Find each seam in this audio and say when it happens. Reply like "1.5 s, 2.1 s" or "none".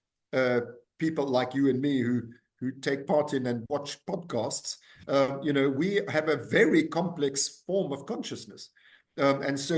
none